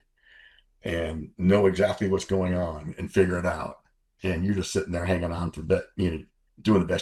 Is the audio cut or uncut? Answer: uncut